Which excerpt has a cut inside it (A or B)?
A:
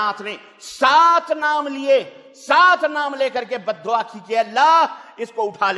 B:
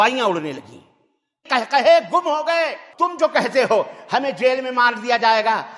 B